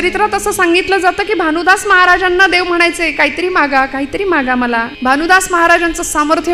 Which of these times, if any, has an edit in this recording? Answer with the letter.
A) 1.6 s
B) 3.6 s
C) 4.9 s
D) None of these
C